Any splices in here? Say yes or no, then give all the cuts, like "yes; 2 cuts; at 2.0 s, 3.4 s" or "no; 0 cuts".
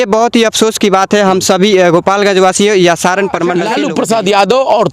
yes; 1 cut; at 3.7 s